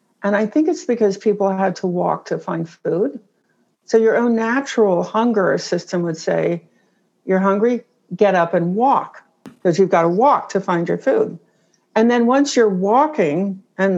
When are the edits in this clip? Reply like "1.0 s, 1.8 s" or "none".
9.5 s